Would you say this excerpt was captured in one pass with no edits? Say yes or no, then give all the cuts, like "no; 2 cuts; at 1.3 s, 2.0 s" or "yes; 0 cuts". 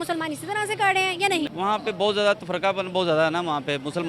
no; 1 cut; at 1.5 s